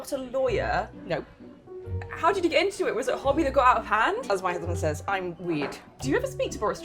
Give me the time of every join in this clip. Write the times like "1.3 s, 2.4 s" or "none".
4.2 s, 5.8 s